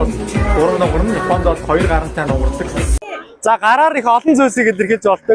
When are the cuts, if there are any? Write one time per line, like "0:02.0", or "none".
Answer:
0:03.0